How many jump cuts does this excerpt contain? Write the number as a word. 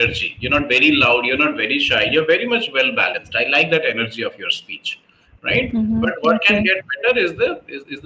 zero